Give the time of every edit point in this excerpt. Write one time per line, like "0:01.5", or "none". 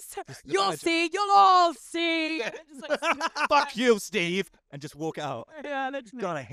none